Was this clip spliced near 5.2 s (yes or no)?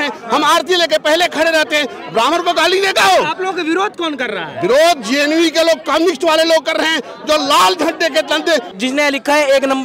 no